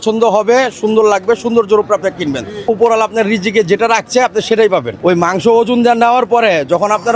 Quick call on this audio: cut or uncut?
cut